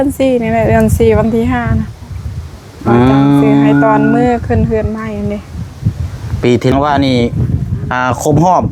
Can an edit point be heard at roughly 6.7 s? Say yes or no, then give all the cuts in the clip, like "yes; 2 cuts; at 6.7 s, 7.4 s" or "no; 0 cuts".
yes; 1 cut; at 6.7 s